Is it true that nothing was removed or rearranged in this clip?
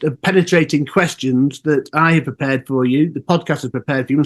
yes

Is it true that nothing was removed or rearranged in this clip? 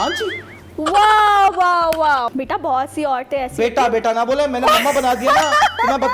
no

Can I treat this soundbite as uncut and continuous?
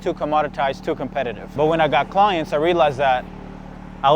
no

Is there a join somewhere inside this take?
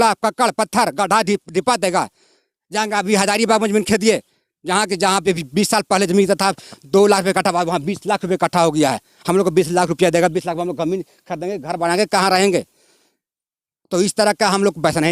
no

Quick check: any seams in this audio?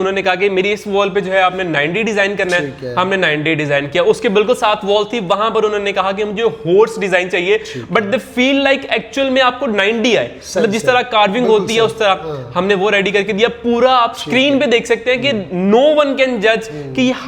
no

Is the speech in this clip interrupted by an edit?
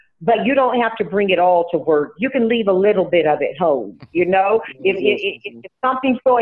no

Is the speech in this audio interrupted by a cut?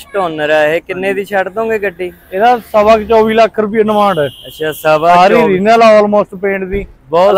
no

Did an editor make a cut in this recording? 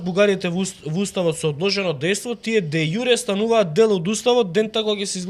no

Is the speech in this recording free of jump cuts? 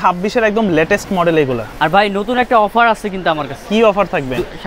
yes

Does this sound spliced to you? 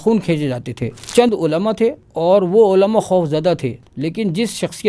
yes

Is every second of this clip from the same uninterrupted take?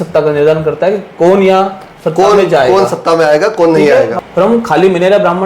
no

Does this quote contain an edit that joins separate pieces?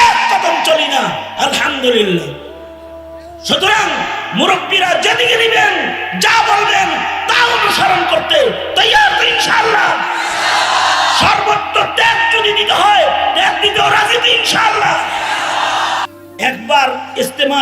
yes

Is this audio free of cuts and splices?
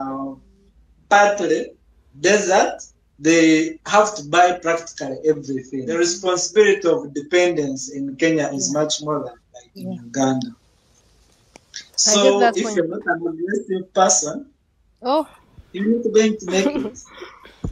no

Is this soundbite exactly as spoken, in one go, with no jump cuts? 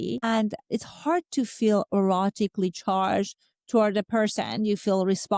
yes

